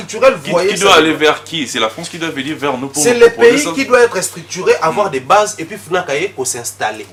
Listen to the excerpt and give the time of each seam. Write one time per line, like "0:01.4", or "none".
none